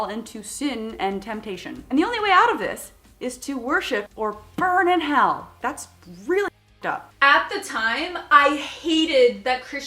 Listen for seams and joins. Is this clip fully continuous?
no; 4 cuts; at 1.7 s, 4.1 s, 5.5 s, 7.0 s

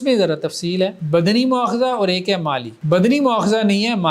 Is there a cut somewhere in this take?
yes; 2 cuts; at 1.0 s, 2.7 s

